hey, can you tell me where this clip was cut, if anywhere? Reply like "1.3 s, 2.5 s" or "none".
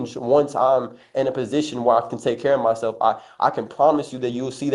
none